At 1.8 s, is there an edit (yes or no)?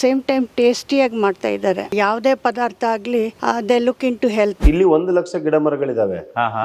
yes